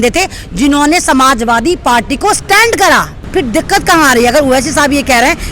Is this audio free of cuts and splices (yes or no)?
no